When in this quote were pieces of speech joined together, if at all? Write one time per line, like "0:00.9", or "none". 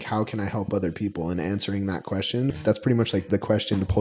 0:02.5